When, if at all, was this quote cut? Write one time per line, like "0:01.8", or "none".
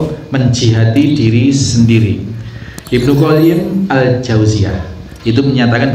none